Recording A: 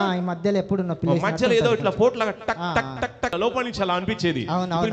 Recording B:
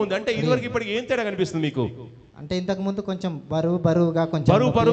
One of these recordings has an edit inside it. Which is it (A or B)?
A